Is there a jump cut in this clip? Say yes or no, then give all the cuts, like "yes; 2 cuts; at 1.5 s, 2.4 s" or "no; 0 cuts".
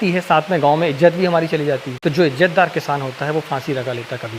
yes; 1 cut; at 1.9 s